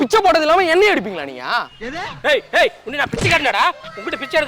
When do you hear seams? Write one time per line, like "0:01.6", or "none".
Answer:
0:01.7